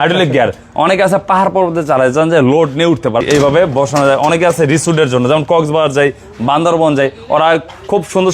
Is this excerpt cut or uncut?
cut